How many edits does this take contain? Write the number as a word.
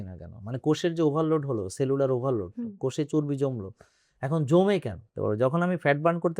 one